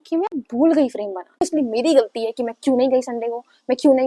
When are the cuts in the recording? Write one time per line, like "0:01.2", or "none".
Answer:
0:01.4